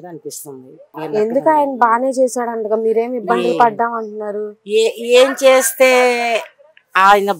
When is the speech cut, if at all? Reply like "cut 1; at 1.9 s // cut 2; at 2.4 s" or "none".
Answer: cut 1; at 1.0 s